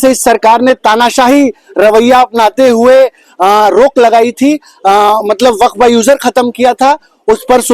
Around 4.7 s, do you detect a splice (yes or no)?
no